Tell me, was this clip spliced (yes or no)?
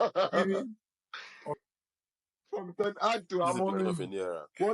yes